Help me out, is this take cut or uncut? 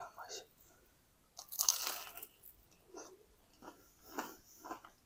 uncut